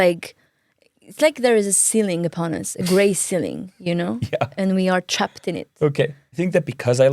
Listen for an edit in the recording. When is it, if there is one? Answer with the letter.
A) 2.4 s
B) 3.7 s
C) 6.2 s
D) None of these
C